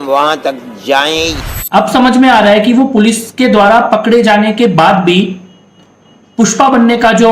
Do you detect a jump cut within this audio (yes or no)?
yes